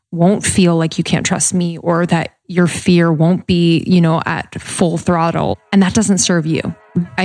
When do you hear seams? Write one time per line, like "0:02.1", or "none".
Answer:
0:05.5